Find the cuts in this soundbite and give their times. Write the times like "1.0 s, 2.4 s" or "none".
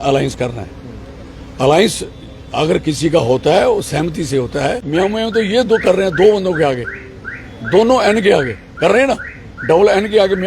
4.8 s